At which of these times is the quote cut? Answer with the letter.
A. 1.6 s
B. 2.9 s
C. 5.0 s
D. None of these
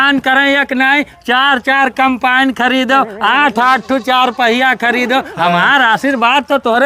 D